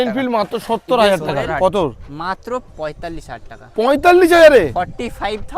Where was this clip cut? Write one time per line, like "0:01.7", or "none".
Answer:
0:01.5